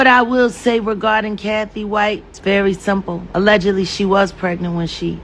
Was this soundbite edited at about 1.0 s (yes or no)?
no